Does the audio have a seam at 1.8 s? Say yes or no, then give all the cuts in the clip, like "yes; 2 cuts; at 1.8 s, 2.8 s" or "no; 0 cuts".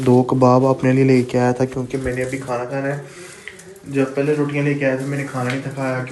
no; 0 cuts